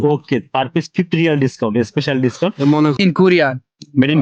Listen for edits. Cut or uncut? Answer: cut